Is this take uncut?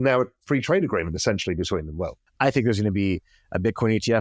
no; 1 cut; at 2.3 s

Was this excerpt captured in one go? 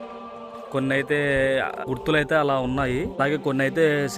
no; 2 cuts; at 1.8 s, 3.2 s

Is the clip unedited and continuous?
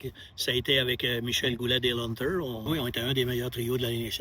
no; 1 cut; at 2.6 s

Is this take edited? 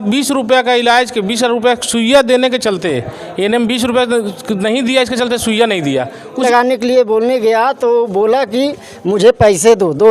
yes; 1 cut; at 6.4 s

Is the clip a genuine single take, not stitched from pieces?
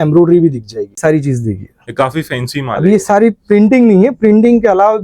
no; 1 cut; at 1.0 s

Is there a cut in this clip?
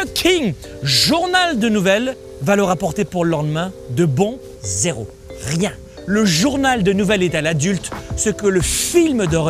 yes; 3 cuts; at 2.3 s, 4.4 s, 5.9 s

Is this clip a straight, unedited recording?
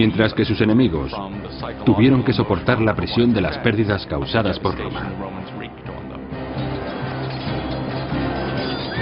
yes; 0 cuts

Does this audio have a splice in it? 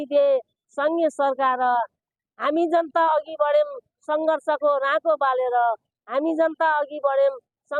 no; 0 cuts

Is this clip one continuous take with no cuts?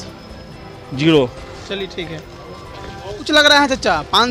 no; 1 cut; at 3.3 s

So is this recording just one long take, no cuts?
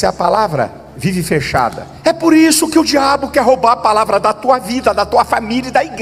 yes; 0 cuts

